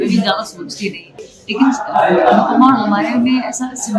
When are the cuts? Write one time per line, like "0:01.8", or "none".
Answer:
0:01.3